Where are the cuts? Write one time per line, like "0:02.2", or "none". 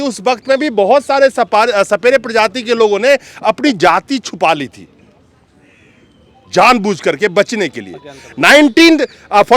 none